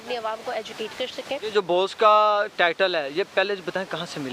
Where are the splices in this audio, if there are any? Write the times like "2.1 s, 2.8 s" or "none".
1.5 s